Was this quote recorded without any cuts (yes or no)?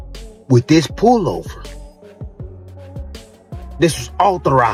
yes